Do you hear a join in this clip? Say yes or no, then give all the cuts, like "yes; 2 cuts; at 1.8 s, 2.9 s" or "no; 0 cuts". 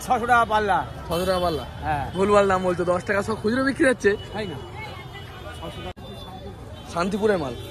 yes; 1 cut; at 5.9 s